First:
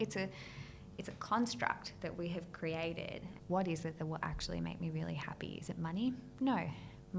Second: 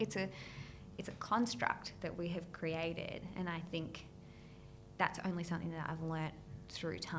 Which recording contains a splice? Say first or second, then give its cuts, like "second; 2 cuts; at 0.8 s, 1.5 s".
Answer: first; 1 cut; at 3.2 s